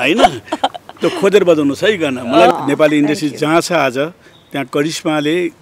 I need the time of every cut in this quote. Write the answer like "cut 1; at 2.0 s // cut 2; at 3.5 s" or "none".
cut 1; at 2.5 s